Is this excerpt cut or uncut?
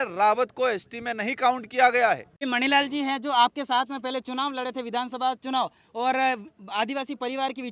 cut